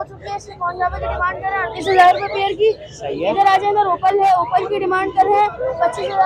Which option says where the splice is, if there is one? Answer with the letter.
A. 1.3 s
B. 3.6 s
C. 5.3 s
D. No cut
D